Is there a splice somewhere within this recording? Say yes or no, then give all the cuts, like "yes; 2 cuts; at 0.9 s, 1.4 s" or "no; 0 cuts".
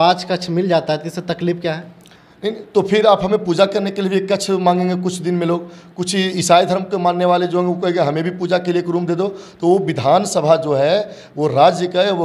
no; 0 cuts